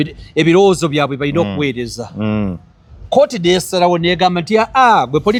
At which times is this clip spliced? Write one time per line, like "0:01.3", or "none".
none

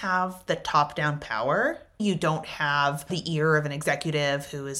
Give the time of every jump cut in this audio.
0:02.0
0:03.2

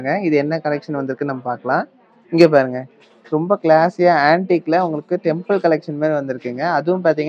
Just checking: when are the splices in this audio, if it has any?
none

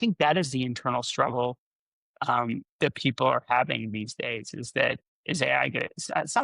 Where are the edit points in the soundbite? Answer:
0:05.1

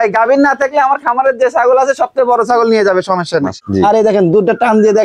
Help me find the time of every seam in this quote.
0:03.5

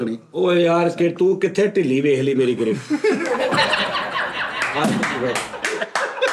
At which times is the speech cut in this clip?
none

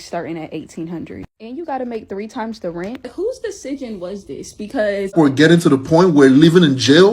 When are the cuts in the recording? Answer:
0:05.1

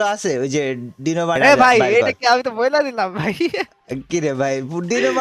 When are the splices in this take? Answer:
0:01.4

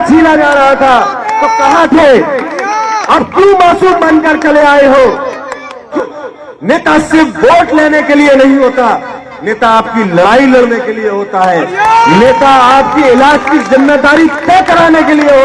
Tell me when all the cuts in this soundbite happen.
0:05.9

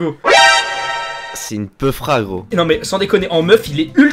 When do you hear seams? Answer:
none

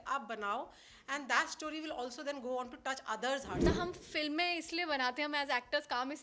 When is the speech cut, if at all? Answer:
0:03.7

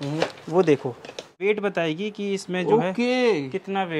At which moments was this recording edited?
0:01.4

